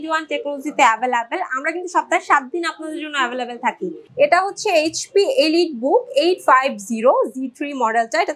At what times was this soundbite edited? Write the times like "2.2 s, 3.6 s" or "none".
4.0 s